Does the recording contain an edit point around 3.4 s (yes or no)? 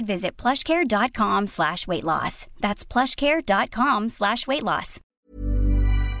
no